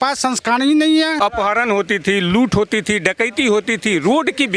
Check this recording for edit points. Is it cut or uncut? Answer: cut